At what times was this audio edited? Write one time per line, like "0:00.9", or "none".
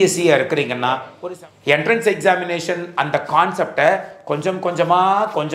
0:01.1